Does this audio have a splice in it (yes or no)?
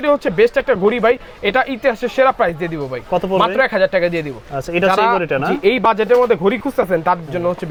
no